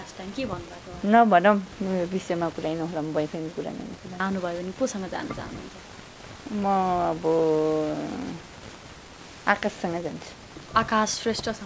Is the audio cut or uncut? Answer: cut